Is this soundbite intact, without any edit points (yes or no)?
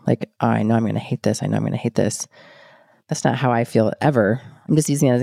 yes